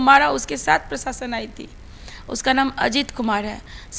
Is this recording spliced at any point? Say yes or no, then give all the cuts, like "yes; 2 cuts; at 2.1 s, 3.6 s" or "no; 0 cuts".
no; 0 cuts